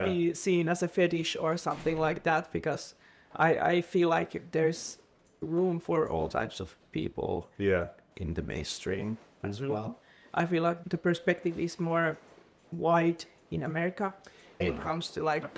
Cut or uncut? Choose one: uncut